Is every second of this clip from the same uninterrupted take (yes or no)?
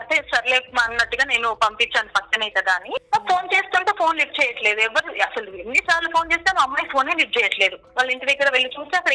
no